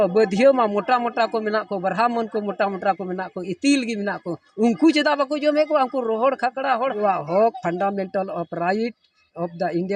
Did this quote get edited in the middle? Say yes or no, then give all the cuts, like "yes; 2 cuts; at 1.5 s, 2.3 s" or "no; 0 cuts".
yes; 1 cut; at 7.0 s